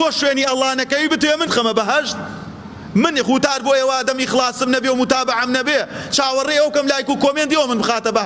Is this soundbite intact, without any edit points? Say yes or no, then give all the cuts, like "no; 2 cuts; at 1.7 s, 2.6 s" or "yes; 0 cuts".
no; 1 cut; at 1.5 s